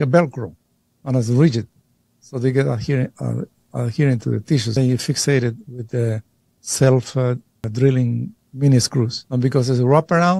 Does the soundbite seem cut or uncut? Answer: cut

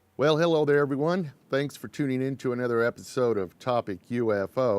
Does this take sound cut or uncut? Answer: uncut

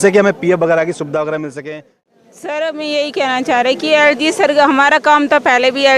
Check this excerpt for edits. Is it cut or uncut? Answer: cut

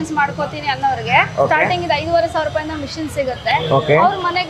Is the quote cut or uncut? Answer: uncut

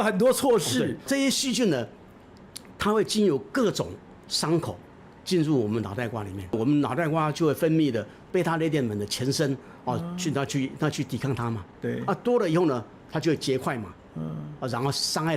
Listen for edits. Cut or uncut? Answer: cut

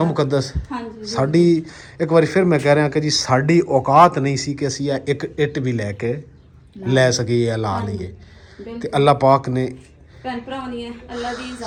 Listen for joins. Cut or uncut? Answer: uncut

